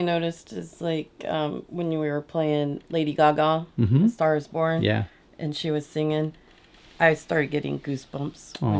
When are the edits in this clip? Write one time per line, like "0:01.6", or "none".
none